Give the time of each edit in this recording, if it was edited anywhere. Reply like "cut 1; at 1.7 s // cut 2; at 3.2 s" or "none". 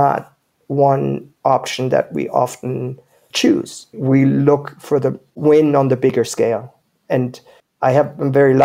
cut 1; at 1.3 s // cut 2; at 5.3 s